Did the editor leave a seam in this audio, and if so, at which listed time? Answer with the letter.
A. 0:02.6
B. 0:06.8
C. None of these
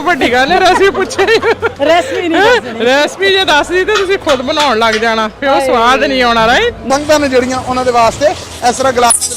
B